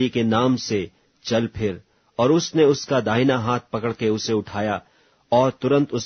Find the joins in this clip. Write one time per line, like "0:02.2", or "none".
0:01.9